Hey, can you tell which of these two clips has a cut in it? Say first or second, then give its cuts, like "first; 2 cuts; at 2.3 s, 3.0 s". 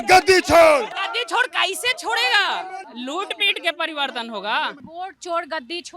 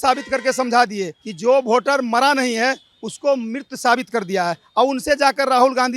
first; 3 cuts; at 0.9 s, 2.8 s, 4.9 s